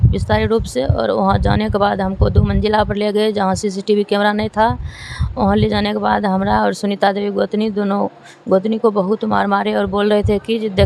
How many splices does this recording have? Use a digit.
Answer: 0